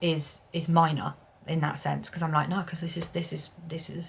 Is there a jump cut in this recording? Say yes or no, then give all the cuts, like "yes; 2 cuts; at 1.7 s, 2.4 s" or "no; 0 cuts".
no; 0 cuts